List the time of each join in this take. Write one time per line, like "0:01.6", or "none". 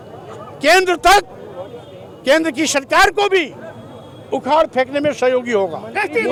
none